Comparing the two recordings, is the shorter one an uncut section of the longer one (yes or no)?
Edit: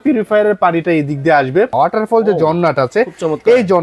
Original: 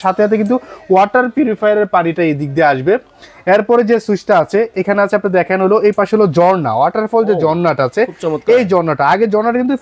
no